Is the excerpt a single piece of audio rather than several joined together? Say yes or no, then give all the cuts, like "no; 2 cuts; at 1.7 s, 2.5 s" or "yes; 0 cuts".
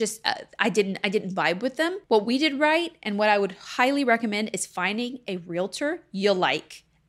no; 1 cut; at 2.0 s